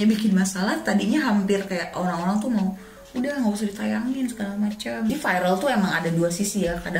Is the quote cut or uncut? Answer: cut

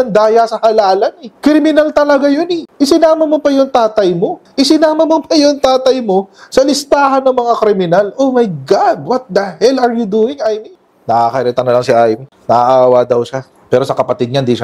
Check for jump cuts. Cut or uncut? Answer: cut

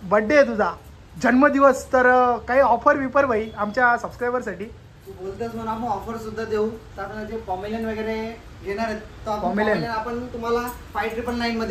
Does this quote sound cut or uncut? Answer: uncut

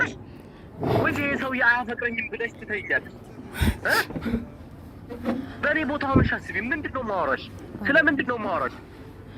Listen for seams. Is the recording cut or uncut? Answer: uncut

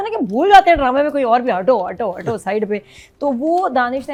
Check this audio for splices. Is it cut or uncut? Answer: uncut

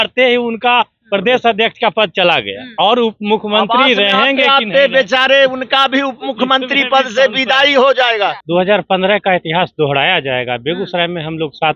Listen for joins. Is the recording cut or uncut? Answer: cut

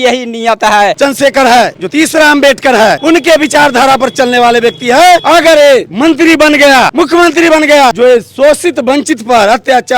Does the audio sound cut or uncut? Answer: cut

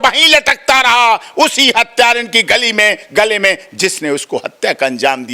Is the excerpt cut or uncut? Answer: uncut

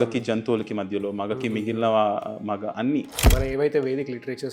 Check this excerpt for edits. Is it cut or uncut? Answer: cut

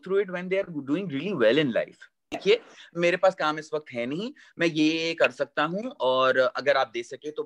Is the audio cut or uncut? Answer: cut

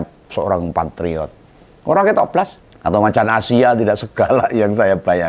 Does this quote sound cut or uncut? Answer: cut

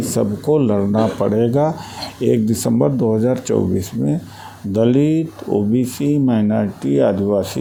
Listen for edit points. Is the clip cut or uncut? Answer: uncut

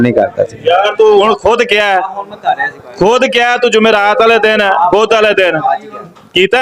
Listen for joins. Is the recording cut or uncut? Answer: uncut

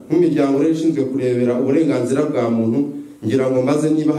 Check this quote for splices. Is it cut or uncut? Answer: uncut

